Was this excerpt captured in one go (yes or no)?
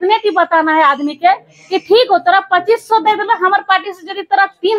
yes